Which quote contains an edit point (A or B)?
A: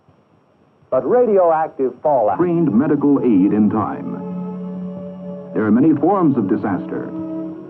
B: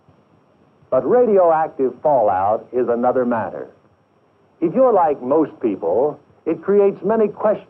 B